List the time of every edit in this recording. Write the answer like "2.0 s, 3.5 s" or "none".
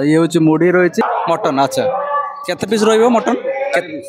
1.0 s